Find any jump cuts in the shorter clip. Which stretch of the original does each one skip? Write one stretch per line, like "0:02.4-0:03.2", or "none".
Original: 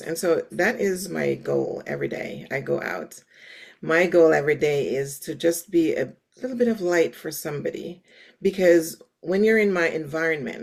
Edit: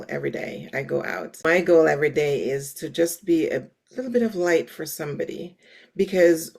0:03.2-0:03.9